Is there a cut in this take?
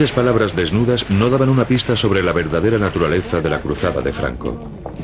yes; 1 cut; at 1.7 s

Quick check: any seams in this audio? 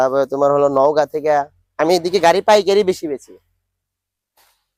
no; 0 cuts

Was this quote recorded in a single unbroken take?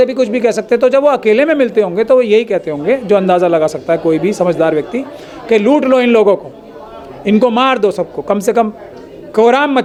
yes; 0 cuts

